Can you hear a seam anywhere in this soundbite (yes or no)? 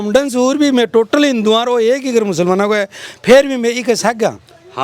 no